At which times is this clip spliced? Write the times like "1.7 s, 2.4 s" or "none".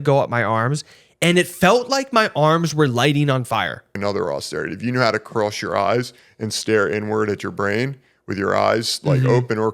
3.9 s